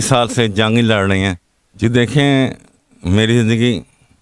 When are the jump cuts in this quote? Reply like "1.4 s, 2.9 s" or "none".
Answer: 1.8 s

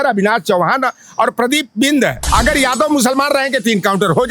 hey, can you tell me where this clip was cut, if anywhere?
2.2 s

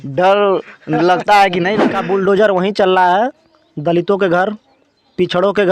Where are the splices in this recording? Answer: 1.9 s

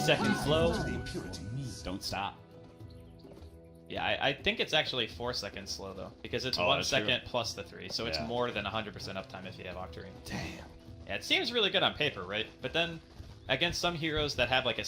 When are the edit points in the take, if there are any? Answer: 9.0 s

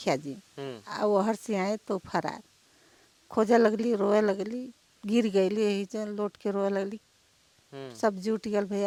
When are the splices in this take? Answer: none

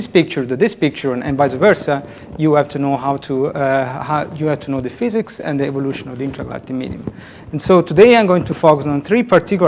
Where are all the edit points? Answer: 5.7 s

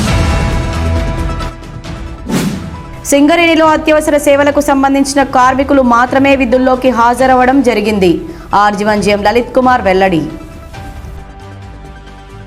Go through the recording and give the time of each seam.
1.1 s

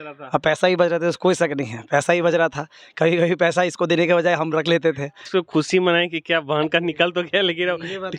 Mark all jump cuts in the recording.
5.2 s

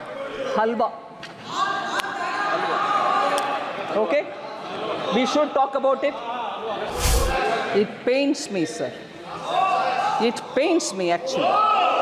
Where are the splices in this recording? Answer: 6.9 s

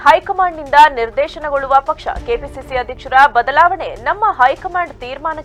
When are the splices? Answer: none

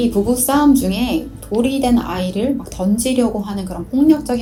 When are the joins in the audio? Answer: none

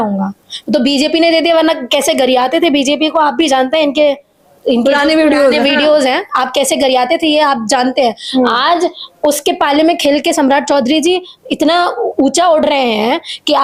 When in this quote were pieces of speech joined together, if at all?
none

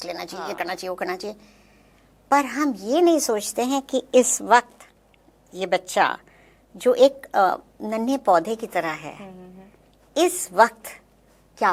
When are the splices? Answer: none

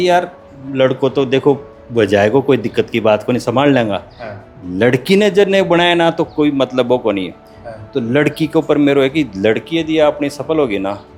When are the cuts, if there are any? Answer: none

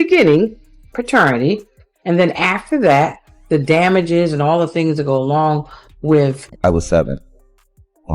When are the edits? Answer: 6.5 s

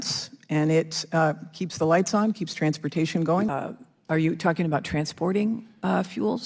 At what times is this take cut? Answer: 3.5 s

